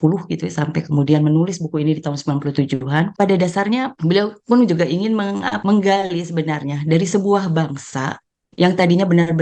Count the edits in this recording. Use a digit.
3